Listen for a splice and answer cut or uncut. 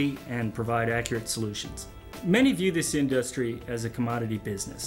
uncut